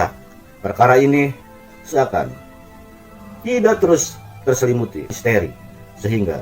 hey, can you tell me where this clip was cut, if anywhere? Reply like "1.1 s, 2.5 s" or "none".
5.1 s

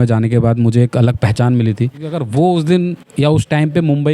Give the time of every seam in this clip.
2.2 s

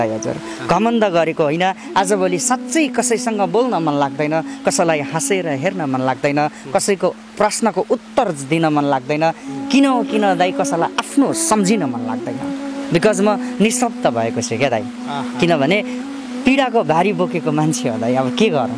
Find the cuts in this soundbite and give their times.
none

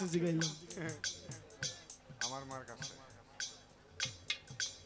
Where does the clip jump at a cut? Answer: none

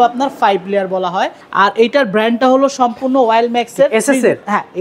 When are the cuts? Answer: 1.4 s

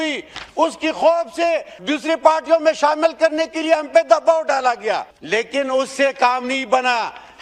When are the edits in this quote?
1.7 s, 5.1 s

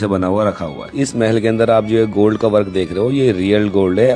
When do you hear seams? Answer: 0.9 s

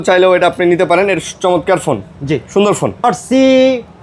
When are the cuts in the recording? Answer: 3.0 s

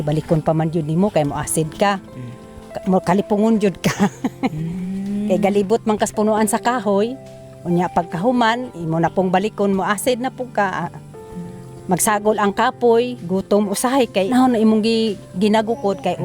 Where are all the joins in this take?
14.3 s

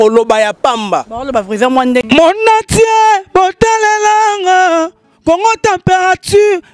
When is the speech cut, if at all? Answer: 2.0 s

